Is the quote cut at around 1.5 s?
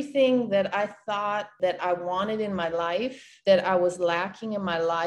yes; 2 cuts; at 1.5 s, 3.2 s

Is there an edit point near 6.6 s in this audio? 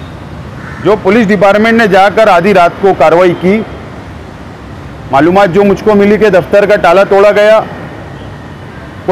no; 0 cuts

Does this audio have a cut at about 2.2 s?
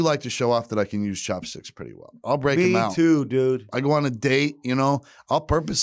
no; 0 cuts

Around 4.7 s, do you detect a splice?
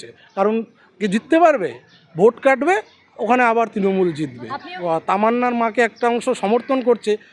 yes; 1 cut; at 4.7 s

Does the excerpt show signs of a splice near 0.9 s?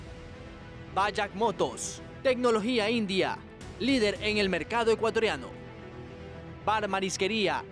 yes; 1 cut; at 0.9 s

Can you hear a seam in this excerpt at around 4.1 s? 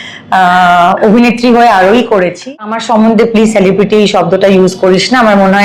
no; 1 cut; at 2.7 s

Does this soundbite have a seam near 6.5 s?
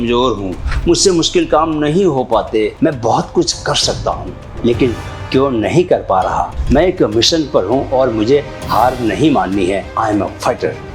yes; 3 cuts; at 2.7 s, 6.5 s, 9.9 s

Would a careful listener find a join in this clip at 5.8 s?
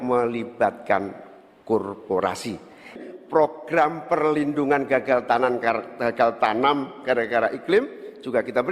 no; 1 cut; at 3.0 s

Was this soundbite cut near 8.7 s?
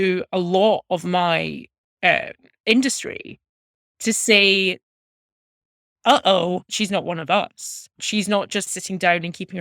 yes; 2 cuts; at 6.7 s, 8.7 s

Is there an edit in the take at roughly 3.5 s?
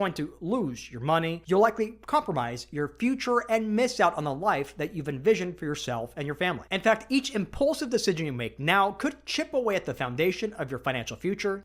no; 1 cut; at 1.4 s

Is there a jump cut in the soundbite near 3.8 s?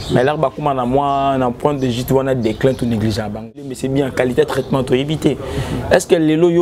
yes; 1 cut; at 3.8 s

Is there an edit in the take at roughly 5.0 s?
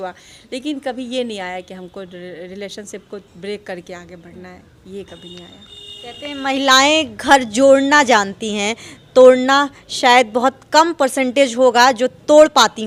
no; 0 cuts

